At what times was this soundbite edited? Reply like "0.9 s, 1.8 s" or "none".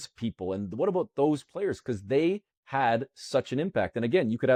none